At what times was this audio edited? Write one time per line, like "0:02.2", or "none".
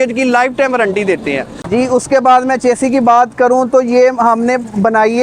0:01.6